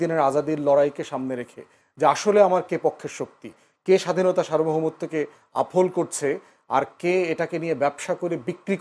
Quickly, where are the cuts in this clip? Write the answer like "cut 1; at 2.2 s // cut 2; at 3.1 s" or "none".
none